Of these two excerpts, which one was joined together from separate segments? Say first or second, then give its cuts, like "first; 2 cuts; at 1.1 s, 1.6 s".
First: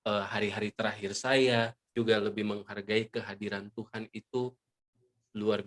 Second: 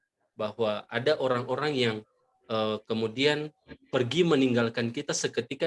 first; 1 cut; at 1.9 s